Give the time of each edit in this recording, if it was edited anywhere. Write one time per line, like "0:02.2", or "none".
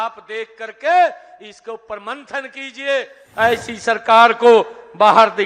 0:03.2